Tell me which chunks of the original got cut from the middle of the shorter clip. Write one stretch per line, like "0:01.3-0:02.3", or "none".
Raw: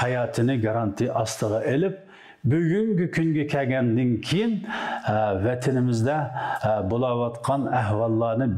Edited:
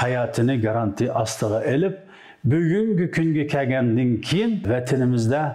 0:04.6-0:05.4